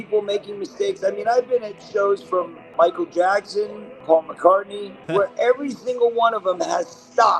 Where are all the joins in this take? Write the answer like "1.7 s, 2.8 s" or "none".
2.6 s, 3.9 s, 5.0 s